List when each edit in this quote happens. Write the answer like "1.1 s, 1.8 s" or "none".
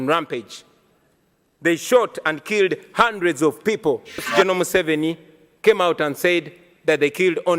4.3 s